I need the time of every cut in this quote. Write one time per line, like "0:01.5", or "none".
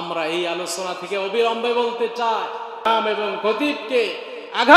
0:02.9